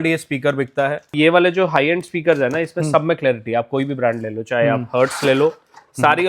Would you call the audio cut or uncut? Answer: cut